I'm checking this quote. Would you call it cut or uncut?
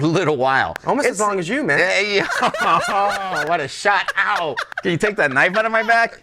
cut